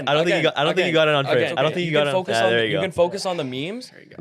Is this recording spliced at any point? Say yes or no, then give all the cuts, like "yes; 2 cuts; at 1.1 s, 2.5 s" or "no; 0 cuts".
yes; 1 cut; at 2.1 s